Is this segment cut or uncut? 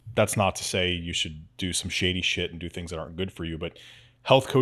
uncut